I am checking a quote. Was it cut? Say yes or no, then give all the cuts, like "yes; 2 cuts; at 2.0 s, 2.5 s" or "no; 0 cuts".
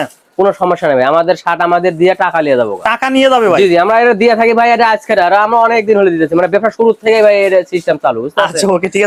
no; 0 cuts